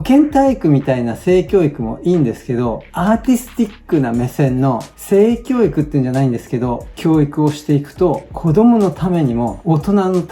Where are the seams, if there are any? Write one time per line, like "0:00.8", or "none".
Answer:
none